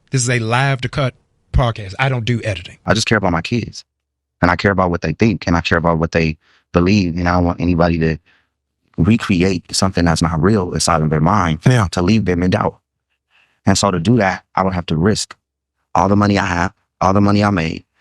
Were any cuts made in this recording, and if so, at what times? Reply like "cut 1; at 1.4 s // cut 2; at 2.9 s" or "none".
cut 1; at 2.7 s